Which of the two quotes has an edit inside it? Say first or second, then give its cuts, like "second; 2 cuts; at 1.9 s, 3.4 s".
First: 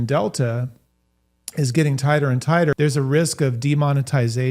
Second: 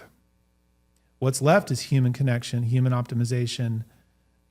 first; 1 cut; at 2.8 s